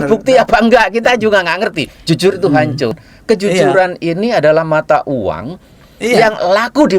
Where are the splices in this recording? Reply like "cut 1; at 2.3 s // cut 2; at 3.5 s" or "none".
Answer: cut 1; at 3.1 s